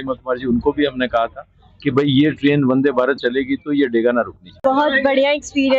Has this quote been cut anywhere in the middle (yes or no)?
yes